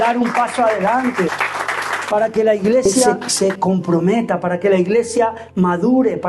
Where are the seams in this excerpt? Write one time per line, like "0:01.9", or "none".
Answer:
0:01.4
0:03.0